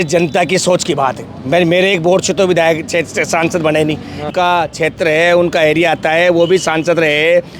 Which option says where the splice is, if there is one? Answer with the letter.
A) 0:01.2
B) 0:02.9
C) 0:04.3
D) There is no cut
C